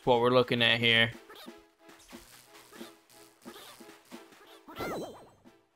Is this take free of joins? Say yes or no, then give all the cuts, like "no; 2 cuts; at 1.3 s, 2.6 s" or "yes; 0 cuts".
yes; 0 cuts